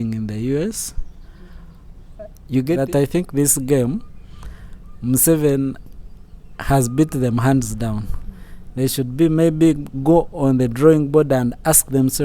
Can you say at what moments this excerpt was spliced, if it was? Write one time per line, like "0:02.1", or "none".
0:02.7